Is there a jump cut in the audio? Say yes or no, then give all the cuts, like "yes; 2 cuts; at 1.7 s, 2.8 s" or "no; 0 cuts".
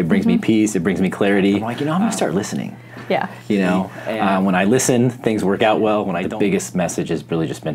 yes; 3 cuts; at 1.7 s, 4.0 s, 6.2 s